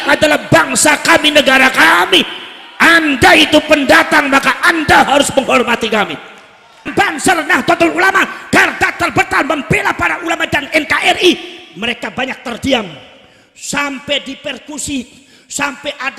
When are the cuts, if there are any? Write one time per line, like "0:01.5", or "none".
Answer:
0:06.9